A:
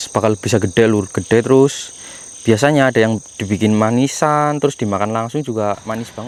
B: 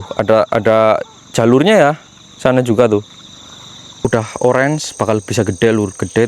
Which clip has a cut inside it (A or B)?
B